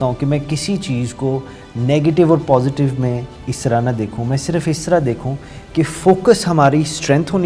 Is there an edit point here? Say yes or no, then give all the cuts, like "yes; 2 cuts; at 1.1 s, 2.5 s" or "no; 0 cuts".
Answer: no; 0 cuts